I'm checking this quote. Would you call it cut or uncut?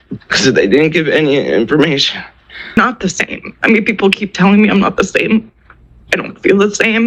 cut